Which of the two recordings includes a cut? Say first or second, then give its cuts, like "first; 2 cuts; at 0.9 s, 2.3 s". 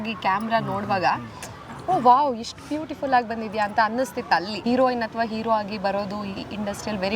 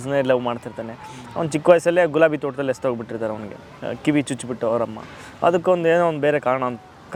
first; 1 cut; at 4.5 s